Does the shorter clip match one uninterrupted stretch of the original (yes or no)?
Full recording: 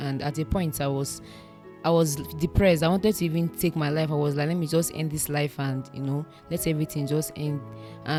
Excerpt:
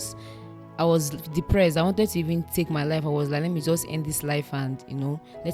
yes